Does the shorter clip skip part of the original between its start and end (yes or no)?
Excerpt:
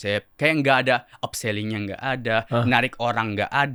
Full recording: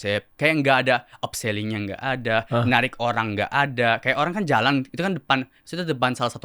no